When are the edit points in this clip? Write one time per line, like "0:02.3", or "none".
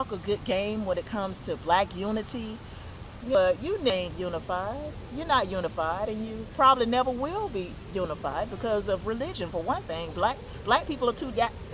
none